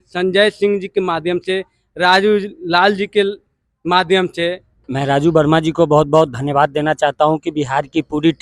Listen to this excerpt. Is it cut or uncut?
cut